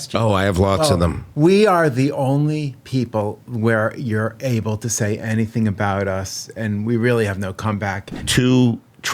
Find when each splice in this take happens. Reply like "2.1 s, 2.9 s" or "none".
8.2 s